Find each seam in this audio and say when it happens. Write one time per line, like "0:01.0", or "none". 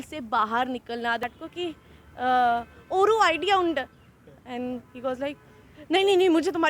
0:01.2